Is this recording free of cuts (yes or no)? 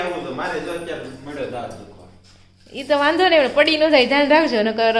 yes